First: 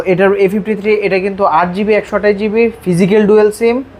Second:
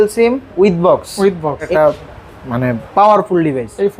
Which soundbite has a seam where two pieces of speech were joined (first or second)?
second